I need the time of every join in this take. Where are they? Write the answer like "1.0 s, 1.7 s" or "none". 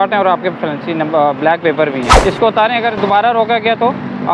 2.2 s